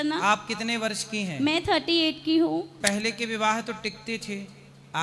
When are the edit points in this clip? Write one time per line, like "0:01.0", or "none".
0:02.8